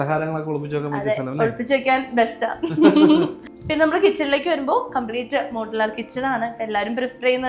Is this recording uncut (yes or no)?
yes